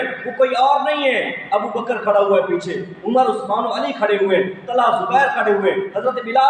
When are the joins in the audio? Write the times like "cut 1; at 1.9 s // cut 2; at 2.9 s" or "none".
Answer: none